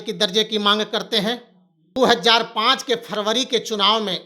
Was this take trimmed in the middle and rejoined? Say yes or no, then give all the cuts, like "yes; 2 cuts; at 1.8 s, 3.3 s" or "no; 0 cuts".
yes; 1 cut; at 2.0 s